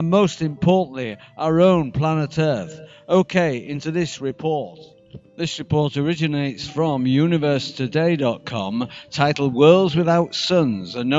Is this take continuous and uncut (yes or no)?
yes